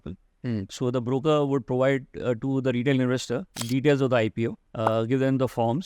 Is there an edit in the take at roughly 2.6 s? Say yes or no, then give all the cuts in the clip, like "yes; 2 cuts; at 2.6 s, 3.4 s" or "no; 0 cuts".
no; 1 cut; at 4.6 s